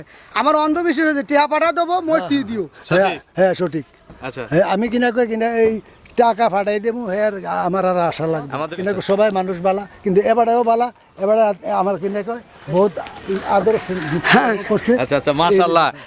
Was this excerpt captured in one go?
no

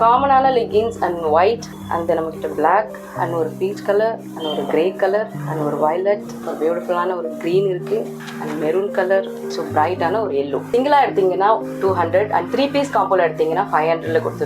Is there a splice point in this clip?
yes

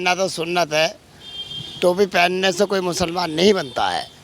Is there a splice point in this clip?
no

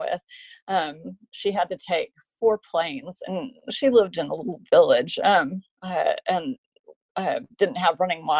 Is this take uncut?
yes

